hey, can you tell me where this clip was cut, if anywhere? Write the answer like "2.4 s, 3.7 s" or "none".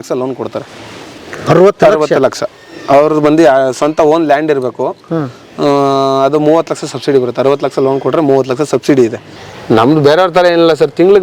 9.3 s

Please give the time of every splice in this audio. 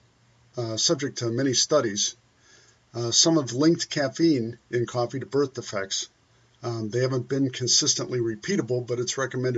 none

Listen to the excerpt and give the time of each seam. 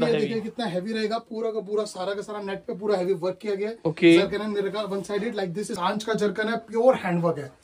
5.7 s

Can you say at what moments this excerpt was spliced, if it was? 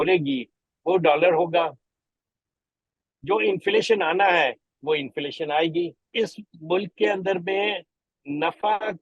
6.1 s

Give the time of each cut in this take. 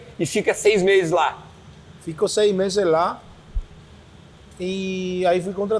none

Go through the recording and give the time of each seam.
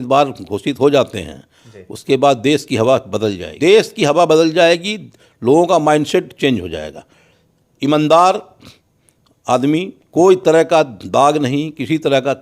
3.4 s

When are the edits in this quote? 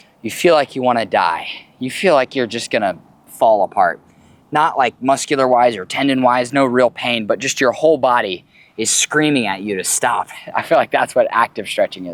none

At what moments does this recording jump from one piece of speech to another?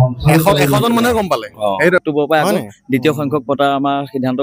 2.0 s

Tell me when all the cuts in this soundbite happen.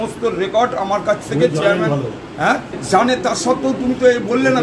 2.8 s

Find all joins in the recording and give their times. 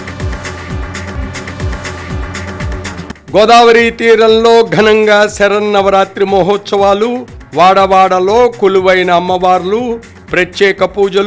none

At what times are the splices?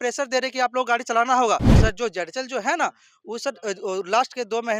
1.7 s

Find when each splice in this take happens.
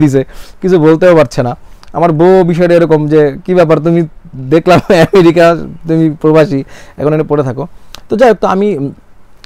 none

